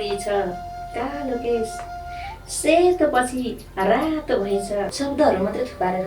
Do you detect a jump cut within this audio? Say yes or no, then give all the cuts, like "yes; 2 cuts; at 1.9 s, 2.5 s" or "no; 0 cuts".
yes; 1 cut; at 4.9 s